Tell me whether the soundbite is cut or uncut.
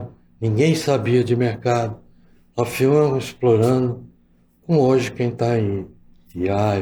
uncut